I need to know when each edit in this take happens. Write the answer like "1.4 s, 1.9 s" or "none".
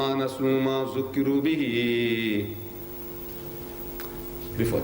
3.1 s